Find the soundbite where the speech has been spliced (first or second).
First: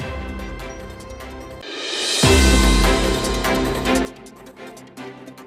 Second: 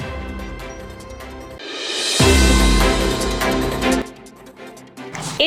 second